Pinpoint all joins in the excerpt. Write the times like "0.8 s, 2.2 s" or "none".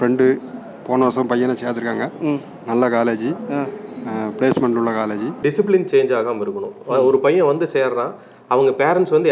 5.4 s